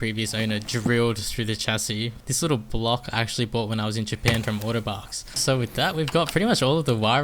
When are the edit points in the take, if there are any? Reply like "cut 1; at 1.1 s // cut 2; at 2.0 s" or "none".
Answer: cut 1; at 2.2 s // cut 2; at 5.4 s